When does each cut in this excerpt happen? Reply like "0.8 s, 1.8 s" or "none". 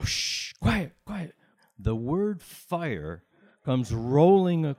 1.5 s